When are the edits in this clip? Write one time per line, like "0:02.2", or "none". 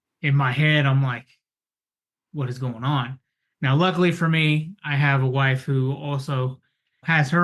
none

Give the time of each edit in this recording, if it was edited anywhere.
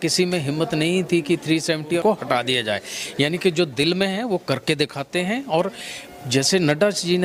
none

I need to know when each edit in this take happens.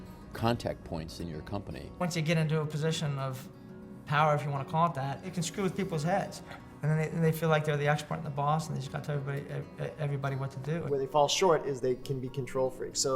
0:02.0
0:05.3
0:10.8

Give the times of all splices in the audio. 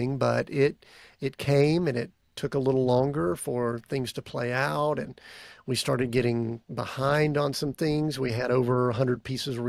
none

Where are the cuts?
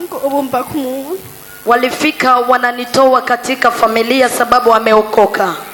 none

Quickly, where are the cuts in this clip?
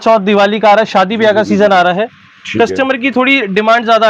none

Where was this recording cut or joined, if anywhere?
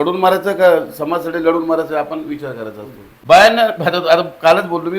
0:03.2

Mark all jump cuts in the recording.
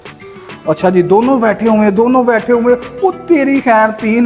none

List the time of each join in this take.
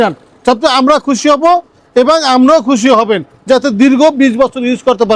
none

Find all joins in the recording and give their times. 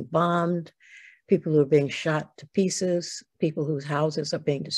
none

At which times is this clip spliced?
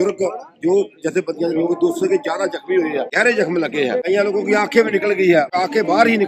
0:03.1
0:04.0
0:05.5

